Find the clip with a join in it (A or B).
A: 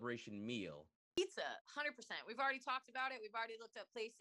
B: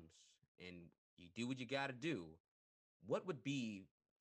A